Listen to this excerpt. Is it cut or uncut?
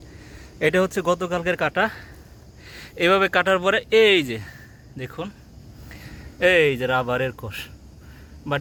uncut